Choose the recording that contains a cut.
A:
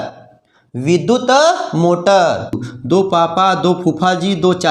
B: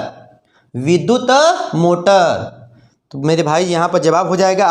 A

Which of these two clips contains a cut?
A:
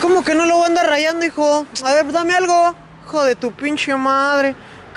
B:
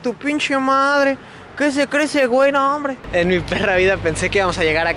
B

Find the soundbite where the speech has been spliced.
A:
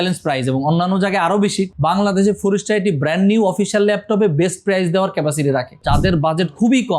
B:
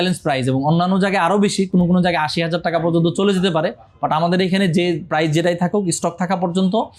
A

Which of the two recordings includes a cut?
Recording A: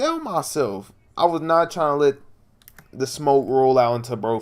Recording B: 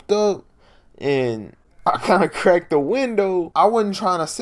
B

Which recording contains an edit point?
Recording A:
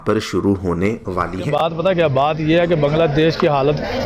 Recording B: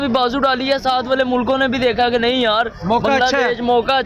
A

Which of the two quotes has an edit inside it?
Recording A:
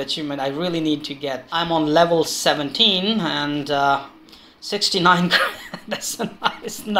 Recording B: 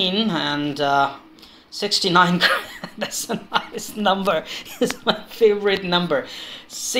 A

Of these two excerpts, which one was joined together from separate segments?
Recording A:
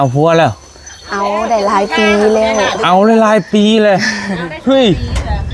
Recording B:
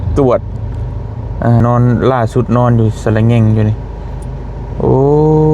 B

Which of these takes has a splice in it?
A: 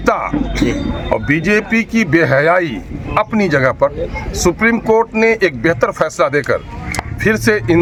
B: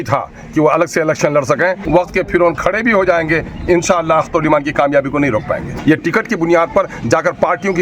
B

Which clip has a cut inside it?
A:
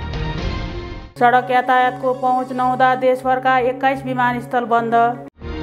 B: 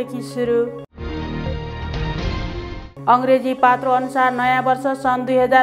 A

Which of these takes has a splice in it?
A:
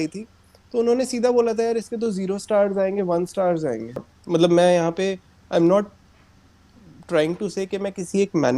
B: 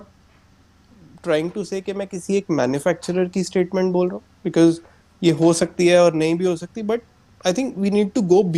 A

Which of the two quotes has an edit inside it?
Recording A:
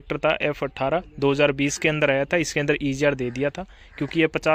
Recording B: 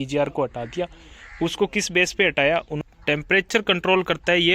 B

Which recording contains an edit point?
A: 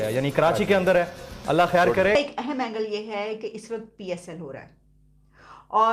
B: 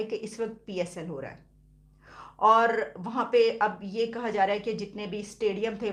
A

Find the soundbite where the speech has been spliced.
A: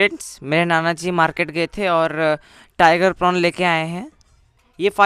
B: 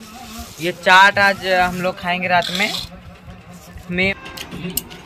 B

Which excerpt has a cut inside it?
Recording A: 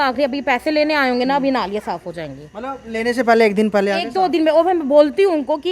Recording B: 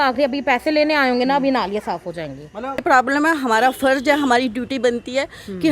B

